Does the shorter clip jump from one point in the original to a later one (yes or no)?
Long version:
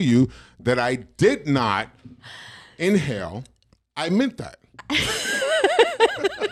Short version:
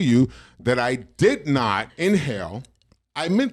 yes